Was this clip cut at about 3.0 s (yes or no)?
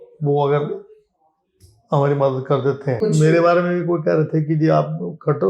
yes